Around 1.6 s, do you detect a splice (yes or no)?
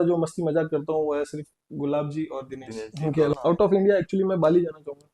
no